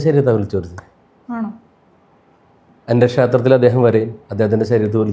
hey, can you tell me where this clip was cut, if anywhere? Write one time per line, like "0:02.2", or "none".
0:02.7